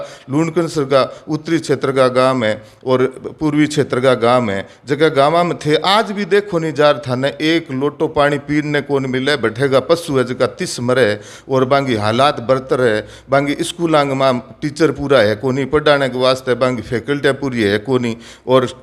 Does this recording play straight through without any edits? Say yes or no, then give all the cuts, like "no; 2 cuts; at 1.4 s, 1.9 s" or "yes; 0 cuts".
yes; 0 cuts